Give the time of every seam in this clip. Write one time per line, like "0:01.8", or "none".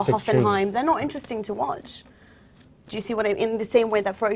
0:03.0